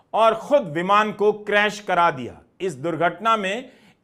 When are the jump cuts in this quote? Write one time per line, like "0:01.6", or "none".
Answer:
0:01.4